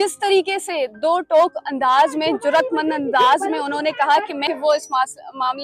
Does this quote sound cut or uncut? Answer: cut